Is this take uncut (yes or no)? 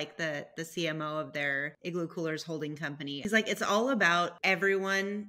no